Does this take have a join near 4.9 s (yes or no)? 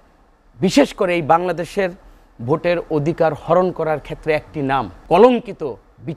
yes